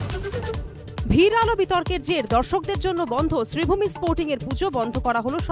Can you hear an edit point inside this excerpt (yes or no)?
no